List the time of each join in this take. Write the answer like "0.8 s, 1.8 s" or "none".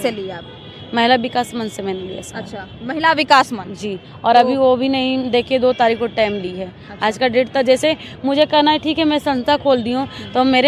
none